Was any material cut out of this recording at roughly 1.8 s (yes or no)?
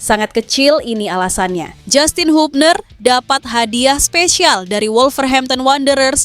yes